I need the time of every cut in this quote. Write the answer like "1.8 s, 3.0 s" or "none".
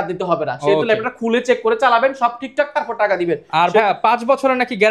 none